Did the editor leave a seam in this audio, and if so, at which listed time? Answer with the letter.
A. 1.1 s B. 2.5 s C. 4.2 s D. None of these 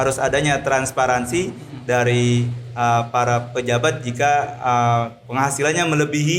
D